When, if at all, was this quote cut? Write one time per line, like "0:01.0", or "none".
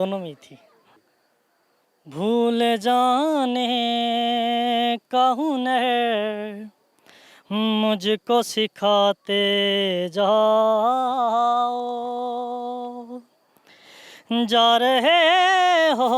0:01.0